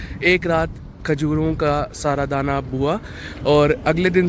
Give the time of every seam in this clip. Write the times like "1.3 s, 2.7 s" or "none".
none